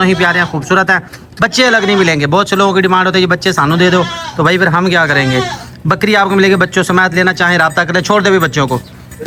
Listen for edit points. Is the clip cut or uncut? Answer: uncut